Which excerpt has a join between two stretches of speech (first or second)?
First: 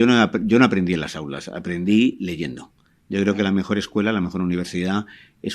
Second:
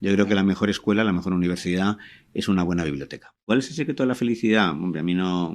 second